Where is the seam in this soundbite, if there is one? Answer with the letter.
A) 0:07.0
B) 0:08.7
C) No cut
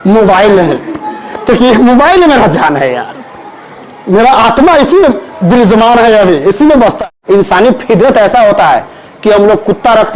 A